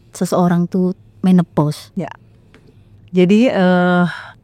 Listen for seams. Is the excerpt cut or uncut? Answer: uncut